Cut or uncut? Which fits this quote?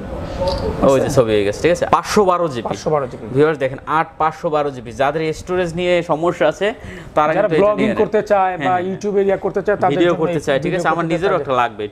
cut